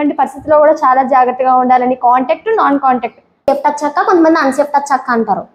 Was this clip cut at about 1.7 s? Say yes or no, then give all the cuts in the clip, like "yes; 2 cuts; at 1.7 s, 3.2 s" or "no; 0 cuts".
no; 1 cut; at 3.5 s